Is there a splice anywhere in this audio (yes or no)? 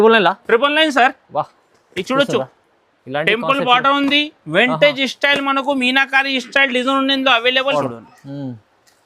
yes